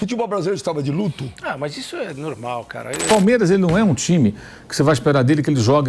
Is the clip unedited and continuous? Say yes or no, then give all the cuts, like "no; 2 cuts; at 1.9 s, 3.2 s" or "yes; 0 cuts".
no; 1 cut; at 3.0 s